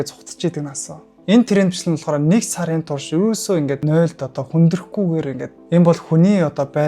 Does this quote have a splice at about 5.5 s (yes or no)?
yes